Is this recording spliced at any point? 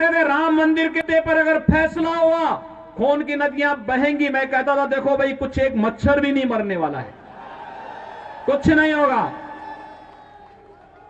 yes; 1 cut; at 1.0 s

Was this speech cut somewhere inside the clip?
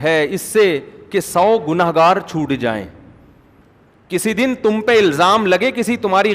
yes; 1 cut; at 3.6 s

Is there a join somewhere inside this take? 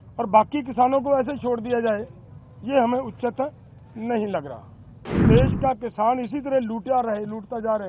yes; 1 cut; at 5.2 s

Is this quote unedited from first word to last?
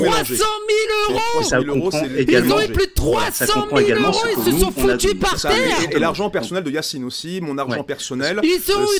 yes; 0 cuts

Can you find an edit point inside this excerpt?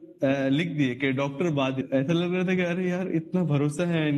yes; 1 cut; at 1.8 s

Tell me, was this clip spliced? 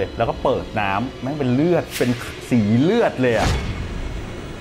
no; 0 cuts

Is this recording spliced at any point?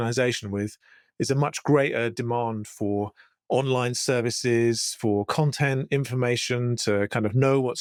no; 0 cuts

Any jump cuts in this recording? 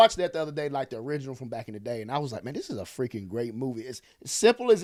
no; 0 cuts

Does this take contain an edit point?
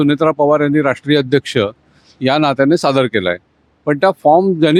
no; 0 cuts

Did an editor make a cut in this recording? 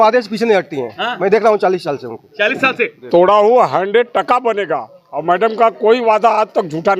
yes; 1 cut; at 3.0 s

